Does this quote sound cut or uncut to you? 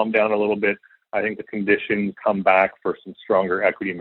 cut